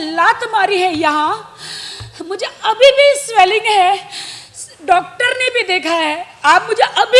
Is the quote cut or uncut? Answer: uncut